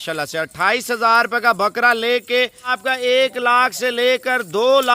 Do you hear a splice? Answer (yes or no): yes